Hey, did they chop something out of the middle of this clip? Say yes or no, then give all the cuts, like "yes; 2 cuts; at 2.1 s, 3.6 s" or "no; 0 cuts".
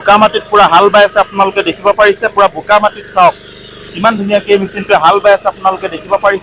no; 0 cuts